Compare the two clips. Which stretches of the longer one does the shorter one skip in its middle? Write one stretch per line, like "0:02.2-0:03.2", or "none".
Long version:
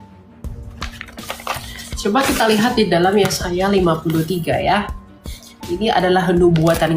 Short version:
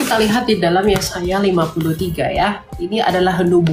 0:05.0-0:05.6

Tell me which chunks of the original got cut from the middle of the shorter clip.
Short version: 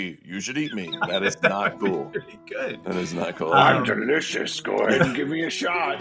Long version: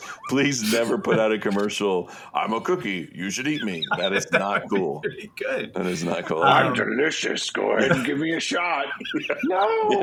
none

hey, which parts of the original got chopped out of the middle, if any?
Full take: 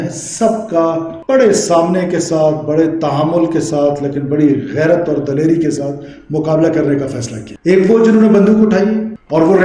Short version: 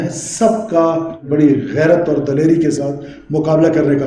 0:01.2-0:04.2

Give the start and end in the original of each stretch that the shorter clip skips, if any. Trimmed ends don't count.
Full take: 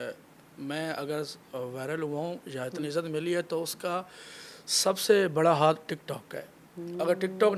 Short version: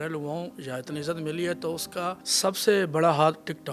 0:04.1-0:04.7

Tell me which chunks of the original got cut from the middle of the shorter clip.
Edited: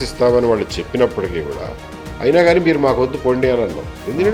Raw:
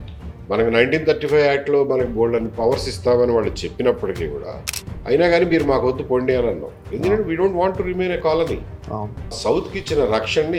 none

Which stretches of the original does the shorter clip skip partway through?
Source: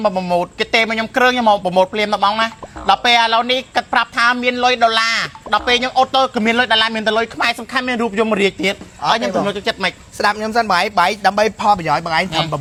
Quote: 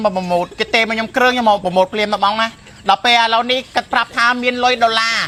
none

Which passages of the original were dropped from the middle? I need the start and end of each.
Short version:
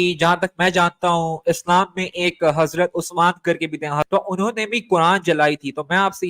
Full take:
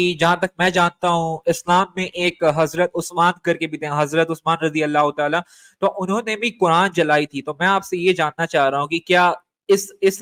0:04.1-0:05.8

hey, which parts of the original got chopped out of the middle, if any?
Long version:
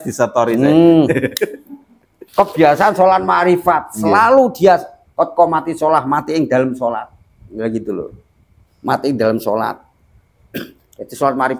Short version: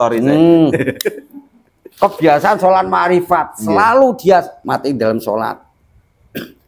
0:04.9-0:08.8

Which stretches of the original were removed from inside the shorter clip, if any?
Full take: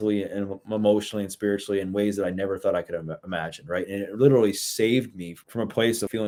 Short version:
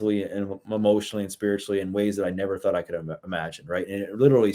none

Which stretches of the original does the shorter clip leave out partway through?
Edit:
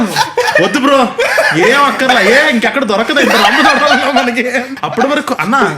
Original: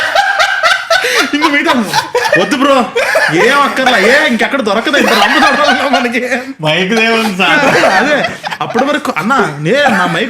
0:06.5-0:08.5

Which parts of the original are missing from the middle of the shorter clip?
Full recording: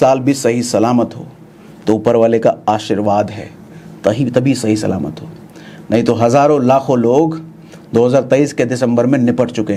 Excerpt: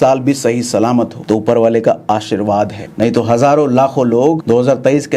0:01.2-0:01.7
0:03.4-0:05.7
0:07.3-0:07.9

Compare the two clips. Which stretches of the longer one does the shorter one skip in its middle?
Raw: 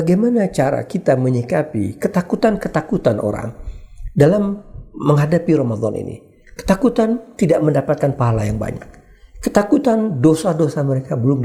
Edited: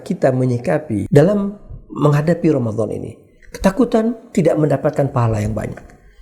0:01.9-0:04.1

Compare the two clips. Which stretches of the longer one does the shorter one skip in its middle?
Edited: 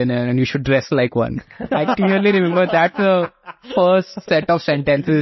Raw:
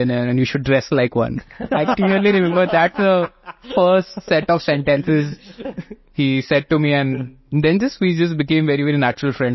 none

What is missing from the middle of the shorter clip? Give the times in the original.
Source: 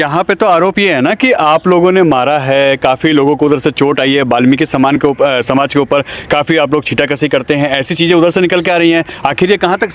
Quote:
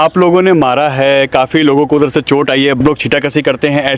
0:04.3-0:06.7

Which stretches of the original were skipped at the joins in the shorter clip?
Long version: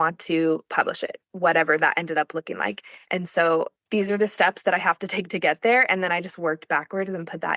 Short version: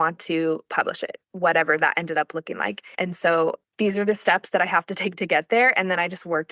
0:02.8-0:03.0

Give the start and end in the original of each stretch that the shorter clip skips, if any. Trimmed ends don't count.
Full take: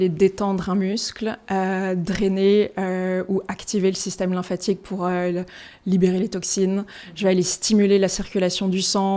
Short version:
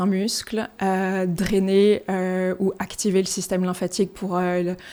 none

